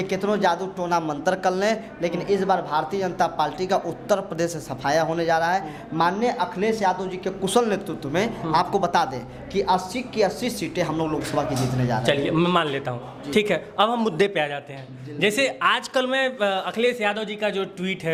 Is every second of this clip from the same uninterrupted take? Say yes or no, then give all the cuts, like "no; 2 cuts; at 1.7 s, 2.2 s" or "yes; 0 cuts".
yes; 0 cuts